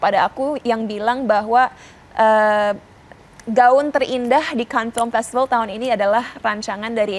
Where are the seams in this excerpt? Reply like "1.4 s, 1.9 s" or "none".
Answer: none